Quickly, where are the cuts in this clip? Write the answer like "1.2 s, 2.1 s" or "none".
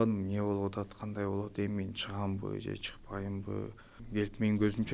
3.9 s

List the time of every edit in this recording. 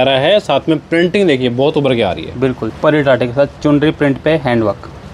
2.7 s

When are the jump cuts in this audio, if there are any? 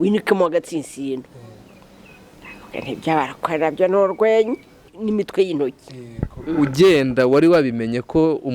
4.9 s

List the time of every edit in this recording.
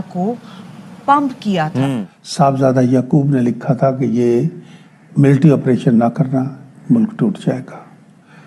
2.1 s

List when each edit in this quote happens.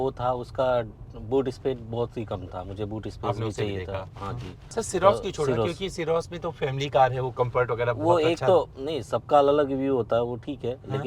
4.5 s

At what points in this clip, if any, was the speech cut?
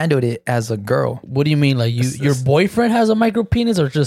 1.2 s

